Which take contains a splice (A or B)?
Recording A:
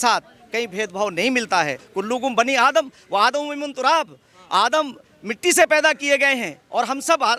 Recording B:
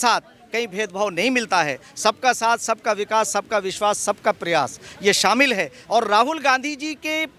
A